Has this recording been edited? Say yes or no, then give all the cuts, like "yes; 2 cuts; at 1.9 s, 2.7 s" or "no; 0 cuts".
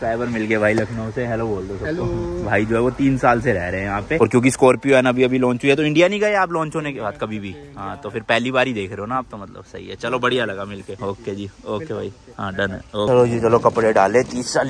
no; 0 cuts